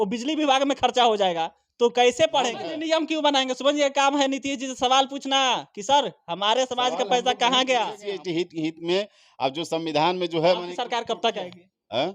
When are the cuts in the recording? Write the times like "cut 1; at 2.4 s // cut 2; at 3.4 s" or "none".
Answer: cut 1; at 2.6 s // cut 2; at 8.0 s